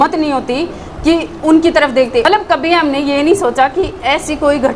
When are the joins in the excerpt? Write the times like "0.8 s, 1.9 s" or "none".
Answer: 2.2 s